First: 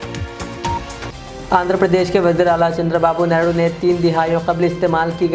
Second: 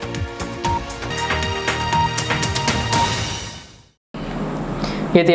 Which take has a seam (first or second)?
first